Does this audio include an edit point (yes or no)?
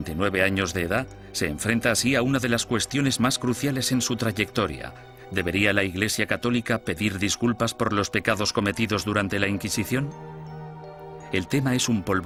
no